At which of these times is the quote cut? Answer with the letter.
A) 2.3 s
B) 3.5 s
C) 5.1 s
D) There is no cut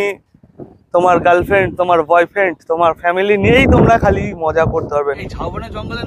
C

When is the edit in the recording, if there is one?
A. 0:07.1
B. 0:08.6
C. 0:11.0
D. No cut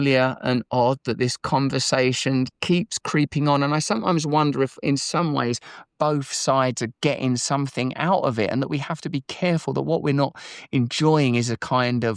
D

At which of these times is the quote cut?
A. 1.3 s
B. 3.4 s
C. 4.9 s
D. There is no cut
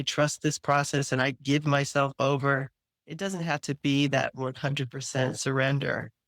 D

